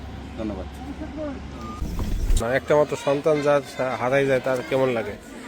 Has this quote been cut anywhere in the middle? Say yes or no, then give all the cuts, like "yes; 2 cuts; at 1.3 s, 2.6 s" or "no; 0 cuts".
yes; 1 cut; at 2.4 s